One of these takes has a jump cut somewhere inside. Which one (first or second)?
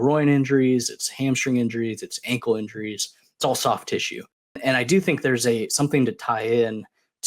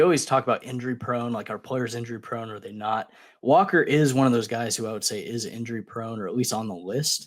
first